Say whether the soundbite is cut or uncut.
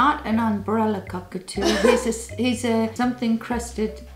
cut